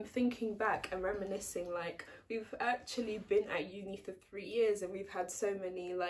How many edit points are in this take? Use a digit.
0